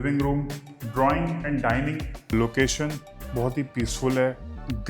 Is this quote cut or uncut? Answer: cut